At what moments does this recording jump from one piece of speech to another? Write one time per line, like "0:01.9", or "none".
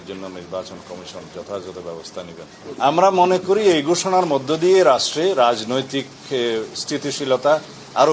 0:02.6